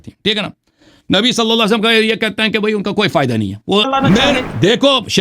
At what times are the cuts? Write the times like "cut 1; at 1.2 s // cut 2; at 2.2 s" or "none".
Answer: cut 1; at 3.8 s